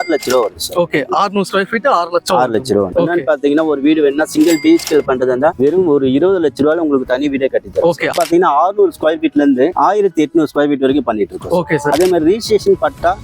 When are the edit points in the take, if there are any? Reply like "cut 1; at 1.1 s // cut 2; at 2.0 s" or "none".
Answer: cut 1; at 2.9 s // cut 2; at 8.1 s // cut 3; at 11.9 s